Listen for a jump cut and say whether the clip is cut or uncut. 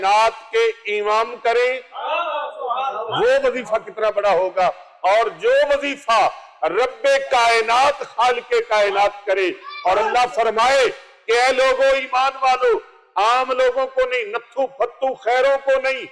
uncut